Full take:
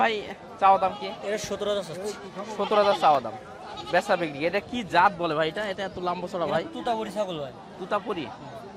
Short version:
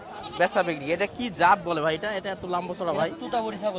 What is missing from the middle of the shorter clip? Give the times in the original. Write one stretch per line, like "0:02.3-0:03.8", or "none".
none